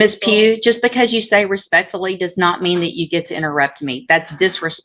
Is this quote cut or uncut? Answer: uncut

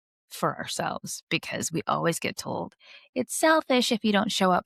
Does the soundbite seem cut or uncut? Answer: uncut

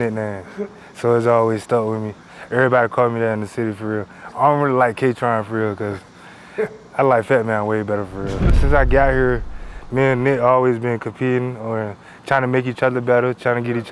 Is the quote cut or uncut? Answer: cut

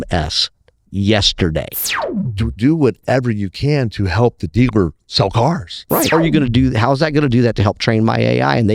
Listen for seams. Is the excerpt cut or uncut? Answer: cut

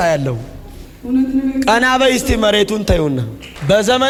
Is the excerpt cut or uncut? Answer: uncut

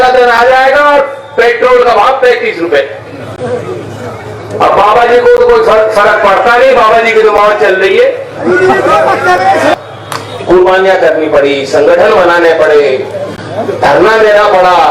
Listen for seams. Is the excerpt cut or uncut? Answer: cut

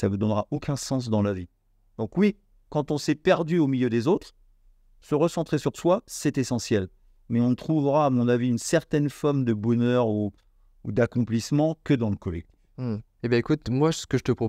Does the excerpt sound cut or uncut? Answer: uncut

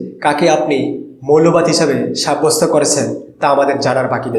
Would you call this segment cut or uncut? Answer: uncut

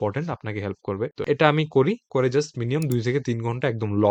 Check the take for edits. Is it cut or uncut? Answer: uncut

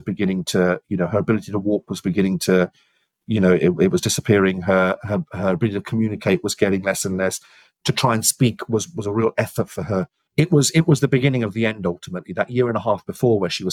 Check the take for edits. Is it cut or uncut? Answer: cut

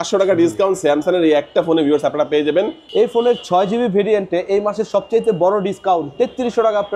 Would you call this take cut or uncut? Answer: cut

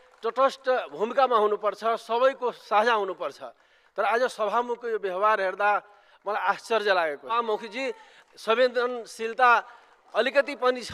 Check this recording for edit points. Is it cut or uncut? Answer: cut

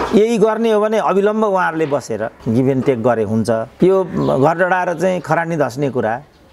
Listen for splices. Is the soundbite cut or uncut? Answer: cut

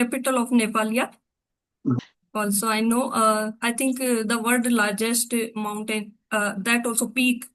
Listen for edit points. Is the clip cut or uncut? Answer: cut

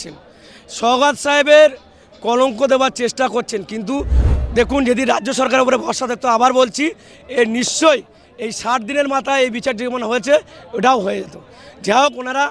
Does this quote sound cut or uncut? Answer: cut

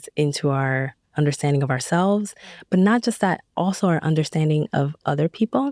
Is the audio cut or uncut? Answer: uncut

